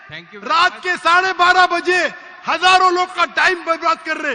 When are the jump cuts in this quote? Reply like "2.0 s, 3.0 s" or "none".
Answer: none